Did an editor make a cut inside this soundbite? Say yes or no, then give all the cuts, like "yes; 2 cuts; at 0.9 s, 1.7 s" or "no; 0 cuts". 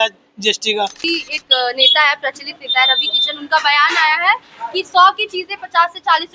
yes; 1 cut; at 1.0 s